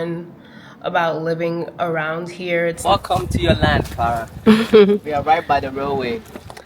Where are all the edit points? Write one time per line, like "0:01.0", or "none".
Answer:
0:02.8

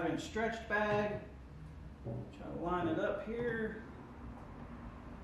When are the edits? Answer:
none

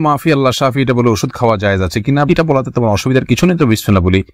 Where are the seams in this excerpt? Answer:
none

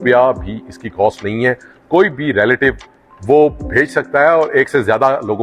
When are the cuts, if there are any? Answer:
none

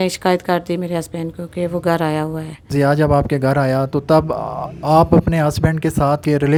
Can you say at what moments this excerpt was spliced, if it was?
none

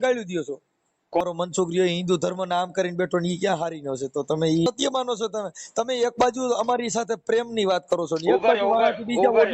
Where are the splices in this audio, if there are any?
0:01.2
0:04.7

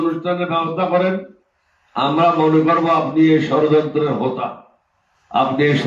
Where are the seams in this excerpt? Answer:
none

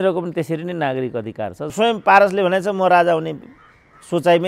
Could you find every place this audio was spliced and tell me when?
0:01.7

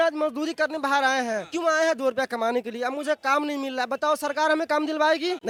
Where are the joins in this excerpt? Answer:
none

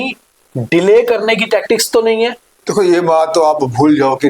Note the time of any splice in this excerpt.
0:02.5

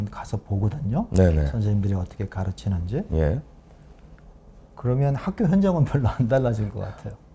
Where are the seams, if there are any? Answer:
none

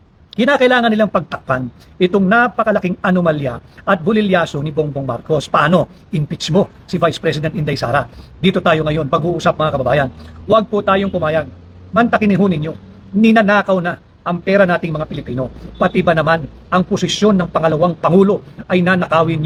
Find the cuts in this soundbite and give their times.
none

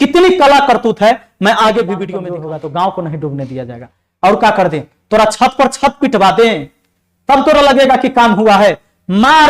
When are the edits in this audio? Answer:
0:02.3

